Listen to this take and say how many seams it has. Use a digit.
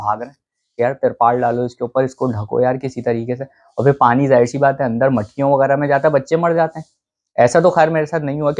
0